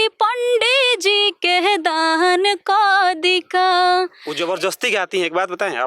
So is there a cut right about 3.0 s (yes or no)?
no